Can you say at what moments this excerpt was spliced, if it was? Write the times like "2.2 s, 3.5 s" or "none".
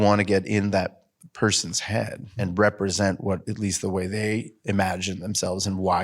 2.4 s